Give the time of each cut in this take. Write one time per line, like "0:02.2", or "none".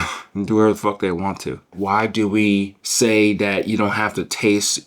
0:01.7
0:02.8